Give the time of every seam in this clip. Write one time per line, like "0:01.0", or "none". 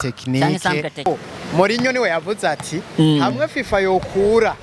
0:01.0